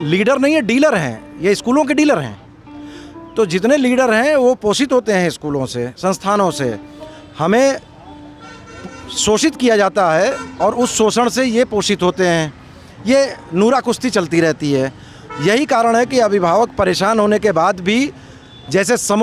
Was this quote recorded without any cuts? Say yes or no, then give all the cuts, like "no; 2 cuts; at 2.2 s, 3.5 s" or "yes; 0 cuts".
yes; 0 cuts